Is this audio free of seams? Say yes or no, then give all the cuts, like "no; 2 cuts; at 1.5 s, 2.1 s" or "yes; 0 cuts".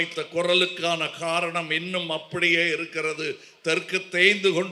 yes; 0 cuts